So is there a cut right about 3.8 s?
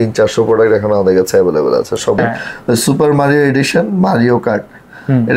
no; 1 cut; at 2.2 s

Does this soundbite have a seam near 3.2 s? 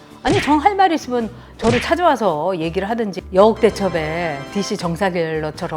yes; 1 cut; at 3.2 s

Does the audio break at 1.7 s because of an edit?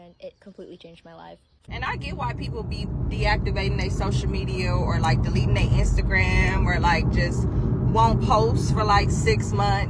yes; 1 cut; at 1.7 s

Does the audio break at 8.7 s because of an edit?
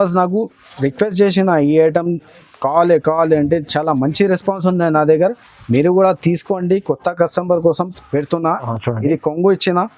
yes; 1 cut; at 8.7 s

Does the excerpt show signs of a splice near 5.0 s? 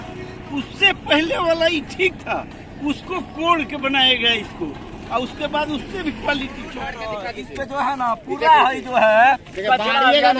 no; 1 cut; at 6.8 s

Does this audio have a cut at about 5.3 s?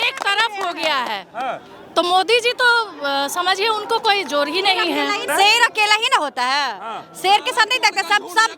yes; 1 cut; at 5.3 s

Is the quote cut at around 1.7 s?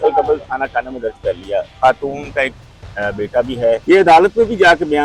yes; 2 cuts; at 1.7 s, 3.8 s

